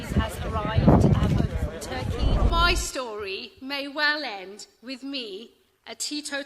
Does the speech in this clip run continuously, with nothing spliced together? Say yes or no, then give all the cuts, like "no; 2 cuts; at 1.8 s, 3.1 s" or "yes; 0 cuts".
no; 1 cut; at 2.5 s